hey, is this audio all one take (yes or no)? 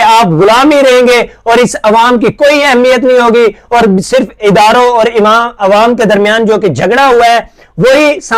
yes